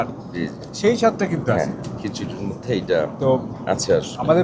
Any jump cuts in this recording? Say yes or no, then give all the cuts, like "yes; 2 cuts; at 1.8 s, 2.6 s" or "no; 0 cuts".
no; 0 cuts